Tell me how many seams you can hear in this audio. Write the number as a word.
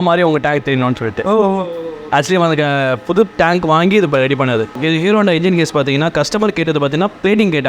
one